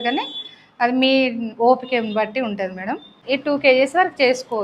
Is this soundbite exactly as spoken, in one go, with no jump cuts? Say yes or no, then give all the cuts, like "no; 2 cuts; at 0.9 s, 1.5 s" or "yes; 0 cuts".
no; 1 cut; at 3.1 s